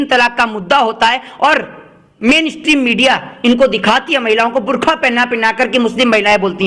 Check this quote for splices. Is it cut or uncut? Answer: uncut